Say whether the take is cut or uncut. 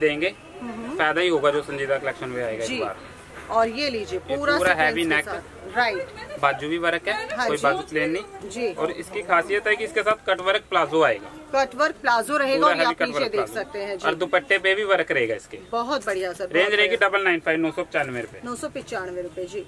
uncut